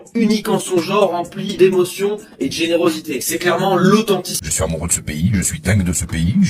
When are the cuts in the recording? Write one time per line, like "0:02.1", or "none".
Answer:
0:04.4